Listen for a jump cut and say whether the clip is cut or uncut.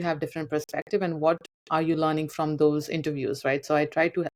uncut